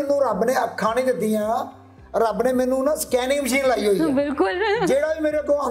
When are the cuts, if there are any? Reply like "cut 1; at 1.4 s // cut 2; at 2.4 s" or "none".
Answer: none